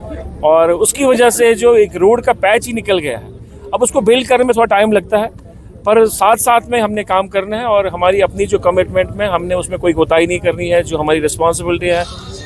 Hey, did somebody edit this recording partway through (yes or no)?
yes